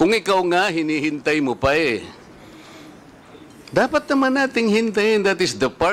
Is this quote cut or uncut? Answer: uncut